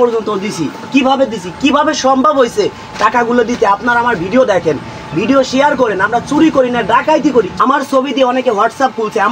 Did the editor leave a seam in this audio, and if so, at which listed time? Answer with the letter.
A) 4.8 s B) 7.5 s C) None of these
B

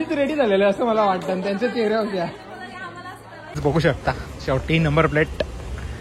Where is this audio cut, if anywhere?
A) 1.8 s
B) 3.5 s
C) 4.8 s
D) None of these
B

